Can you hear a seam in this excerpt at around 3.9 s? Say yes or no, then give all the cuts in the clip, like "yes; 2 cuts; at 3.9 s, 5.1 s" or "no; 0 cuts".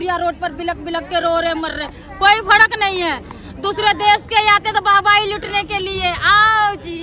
no; 0 cuts